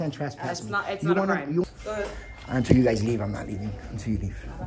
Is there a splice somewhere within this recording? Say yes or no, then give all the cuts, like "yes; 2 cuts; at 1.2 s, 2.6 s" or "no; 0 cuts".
yes; 1 cut; at 1.6 s